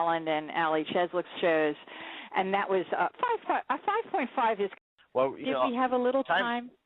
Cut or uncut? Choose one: uncut